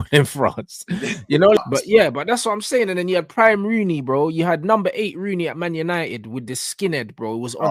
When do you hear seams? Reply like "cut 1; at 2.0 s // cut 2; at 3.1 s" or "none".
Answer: cut 1; at 1.6 s